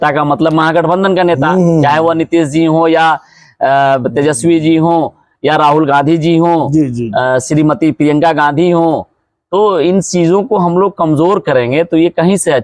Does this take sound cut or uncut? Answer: uncut